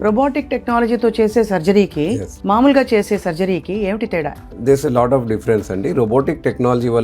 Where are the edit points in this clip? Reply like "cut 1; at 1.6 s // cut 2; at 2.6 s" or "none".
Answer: cut 1; at 4.4 s